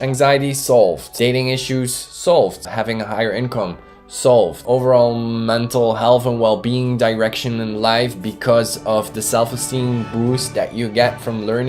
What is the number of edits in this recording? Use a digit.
2